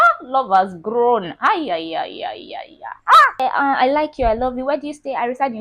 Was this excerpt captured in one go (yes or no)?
no